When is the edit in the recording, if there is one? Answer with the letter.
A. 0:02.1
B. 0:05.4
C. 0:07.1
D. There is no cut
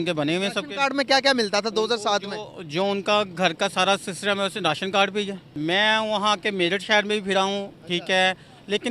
B